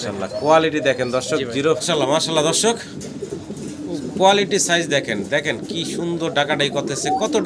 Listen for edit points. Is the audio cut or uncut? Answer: cut